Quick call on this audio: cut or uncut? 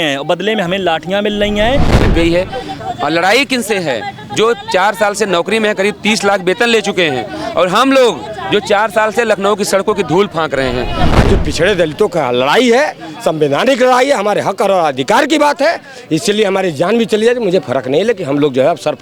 cut